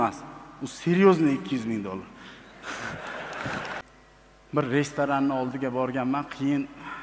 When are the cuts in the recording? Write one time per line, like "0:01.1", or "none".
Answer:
0:03.8